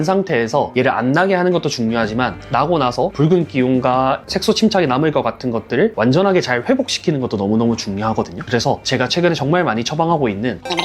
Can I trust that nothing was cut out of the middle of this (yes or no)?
yes